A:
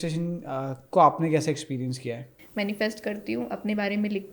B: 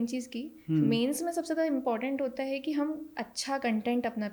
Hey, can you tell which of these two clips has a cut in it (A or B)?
A